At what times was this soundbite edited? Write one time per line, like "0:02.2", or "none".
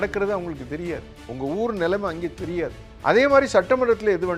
0:02.9

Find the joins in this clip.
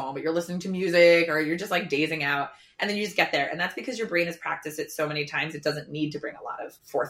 none

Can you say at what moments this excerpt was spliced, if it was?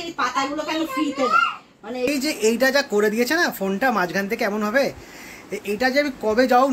0:02.1

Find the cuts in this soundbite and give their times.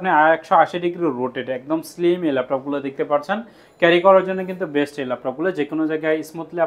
none

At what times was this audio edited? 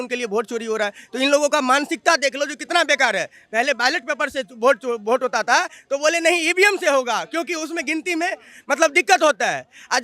none

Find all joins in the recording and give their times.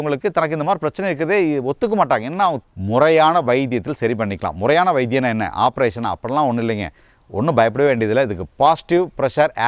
0:02.6

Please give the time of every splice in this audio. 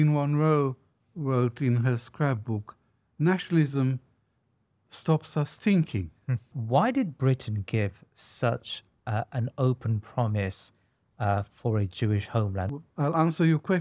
0:06.6
0:12.7

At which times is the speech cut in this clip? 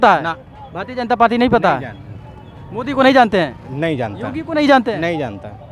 none

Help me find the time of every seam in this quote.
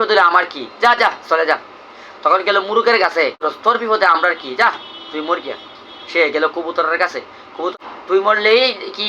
0:03.5
0:07.7

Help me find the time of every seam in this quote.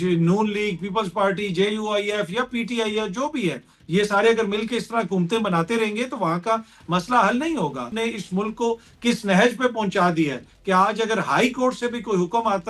0:07.9

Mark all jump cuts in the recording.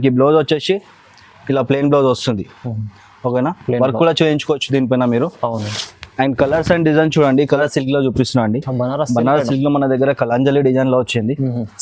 0:07.6

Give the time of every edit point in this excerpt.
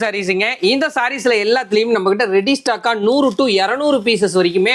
none

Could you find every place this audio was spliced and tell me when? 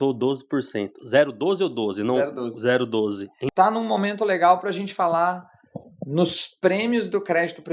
0:03.4

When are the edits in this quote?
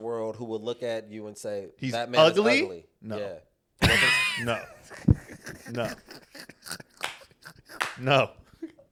none

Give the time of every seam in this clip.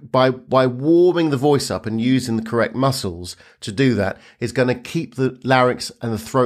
none

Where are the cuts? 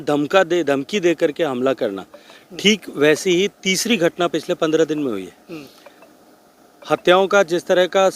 none

